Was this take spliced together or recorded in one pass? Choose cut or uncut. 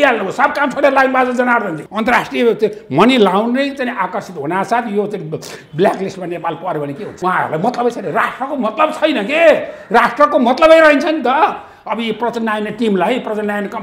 cut